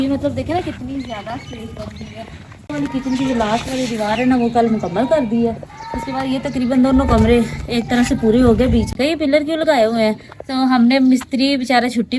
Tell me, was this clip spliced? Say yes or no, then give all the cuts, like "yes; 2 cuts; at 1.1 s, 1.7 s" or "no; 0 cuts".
yes; 2 cuts; at 2.7 s, 8.9 s